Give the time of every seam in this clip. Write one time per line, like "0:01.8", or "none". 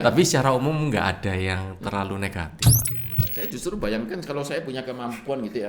0:02.9